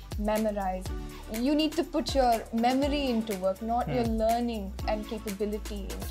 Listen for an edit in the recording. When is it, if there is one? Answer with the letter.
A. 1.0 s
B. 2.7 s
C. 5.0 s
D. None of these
A